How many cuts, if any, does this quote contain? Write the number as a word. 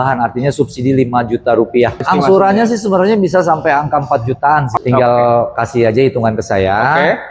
two